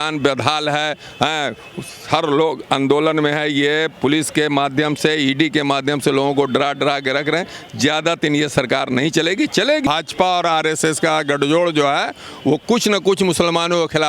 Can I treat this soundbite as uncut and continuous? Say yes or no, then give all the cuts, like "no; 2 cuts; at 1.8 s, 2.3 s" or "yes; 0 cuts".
no; 1 cut; at 9.9 s